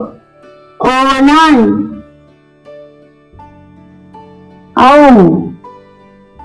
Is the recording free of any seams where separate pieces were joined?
no; 2 cuts; at 2.1 s, 4.6 s

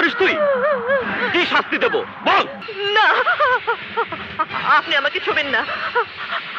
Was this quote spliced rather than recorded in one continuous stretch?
yes; 1 cut; at 2.6 s

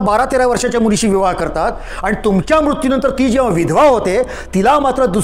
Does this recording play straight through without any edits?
yes; 0 cuts

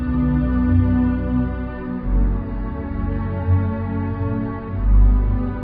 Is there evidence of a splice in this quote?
no; 0 cuts

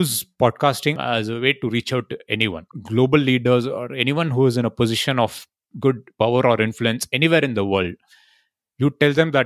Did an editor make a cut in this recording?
yes; 2 cuts; at 1.0 s, 2.6 s

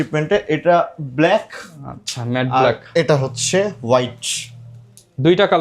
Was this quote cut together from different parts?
no; 0 cuts

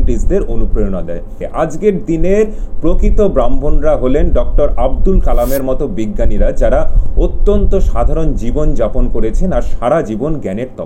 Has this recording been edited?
yes; 1 cut; at 1.4 s

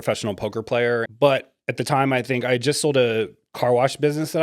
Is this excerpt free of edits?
no; 1 cut; at 1.1 s

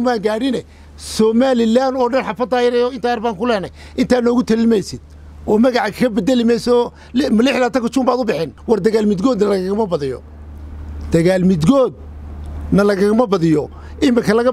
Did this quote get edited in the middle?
yes; 1 cut; at 8.5 s

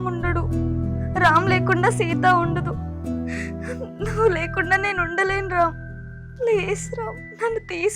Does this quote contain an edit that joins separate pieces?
no; 0 cuts

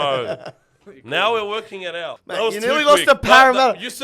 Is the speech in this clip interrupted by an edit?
yes; 1 cut; at 2.2 s

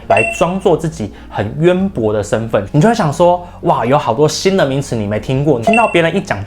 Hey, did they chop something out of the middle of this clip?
yes; 2 cuts; at 2.7 s, 5.6 s

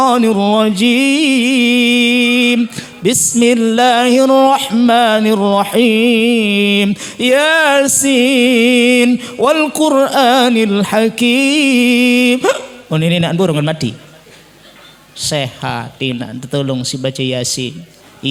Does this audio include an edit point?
no; 0 cuts

